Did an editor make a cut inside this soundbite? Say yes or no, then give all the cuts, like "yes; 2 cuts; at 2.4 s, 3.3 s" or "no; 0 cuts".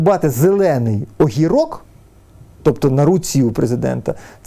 no; 0 cuts